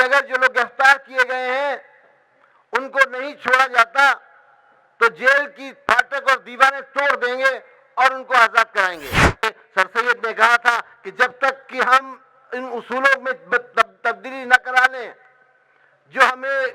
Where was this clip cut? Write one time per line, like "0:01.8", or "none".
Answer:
0:09.4